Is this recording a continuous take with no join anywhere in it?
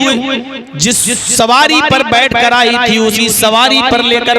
yes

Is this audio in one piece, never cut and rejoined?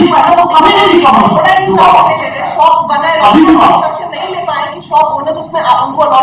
yes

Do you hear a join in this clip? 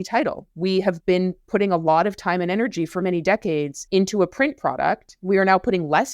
yes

